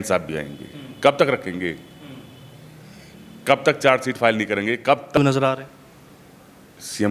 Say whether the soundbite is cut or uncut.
cut